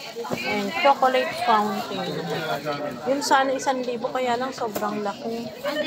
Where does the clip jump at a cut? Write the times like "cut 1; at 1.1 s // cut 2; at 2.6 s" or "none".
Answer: none